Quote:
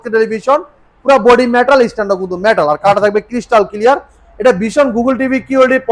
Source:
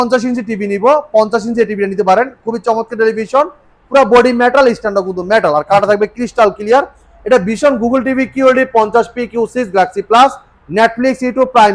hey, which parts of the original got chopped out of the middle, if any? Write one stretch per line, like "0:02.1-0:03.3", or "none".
none

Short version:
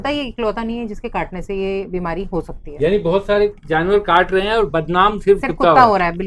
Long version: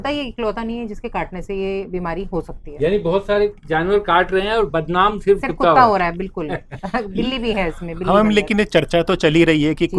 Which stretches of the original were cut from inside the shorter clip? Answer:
none

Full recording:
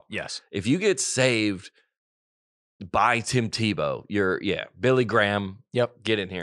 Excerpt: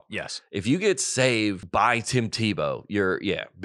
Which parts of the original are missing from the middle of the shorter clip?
0:01.6-0:02.8

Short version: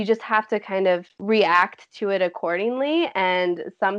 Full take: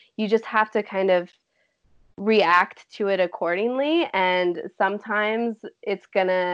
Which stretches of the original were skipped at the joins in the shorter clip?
0:01.3-0:02.1

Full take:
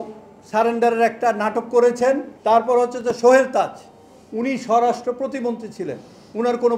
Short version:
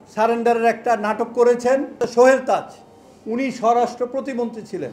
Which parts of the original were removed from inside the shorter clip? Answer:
0:02.3-0:03.0

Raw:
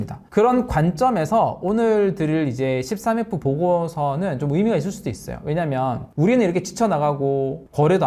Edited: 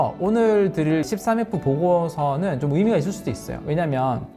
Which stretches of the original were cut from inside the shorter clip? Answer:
0:02.5-0:02.9

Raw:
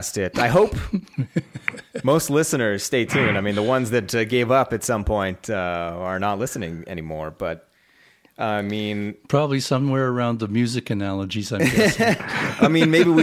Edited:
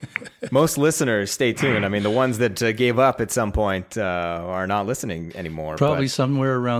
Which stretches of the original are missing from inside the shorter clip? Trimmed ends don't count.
0:07.2-0:09.2

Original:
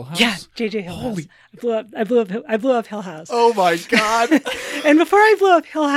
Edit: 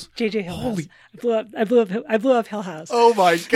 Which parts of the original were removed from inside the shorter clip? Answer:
none

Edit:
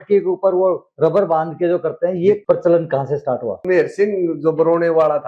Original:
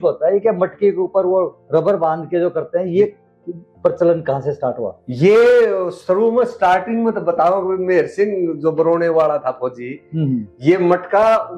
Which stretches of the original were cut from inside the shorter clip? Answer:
0:03.1-0:03.8
0:05.0-0:07.8

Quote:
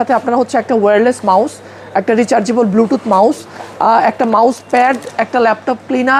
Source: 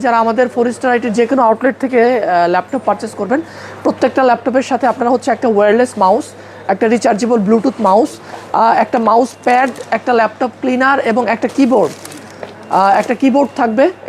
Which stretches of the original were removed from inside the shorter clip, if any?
none

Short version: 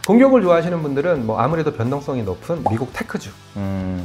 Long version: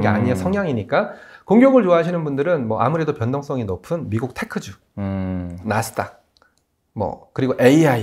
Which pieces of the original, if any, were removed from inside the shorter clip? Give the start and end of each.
none

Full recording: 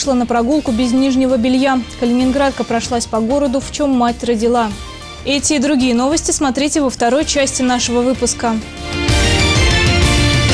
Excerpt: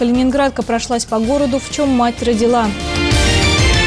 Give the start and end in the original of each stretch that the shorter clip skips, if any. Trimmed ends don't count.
0:04.8-0:08.8

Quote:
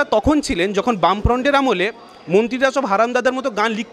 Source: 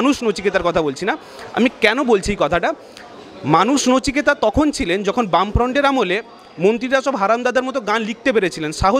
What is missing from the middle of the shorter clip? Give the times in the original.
none

